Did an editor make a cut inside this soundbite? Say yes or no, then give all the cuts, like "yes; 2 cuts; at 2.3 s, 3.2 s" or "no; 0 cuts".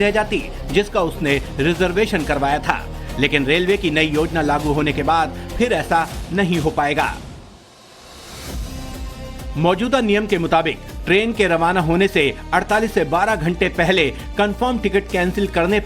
yes; 1 cut; at 3.8 s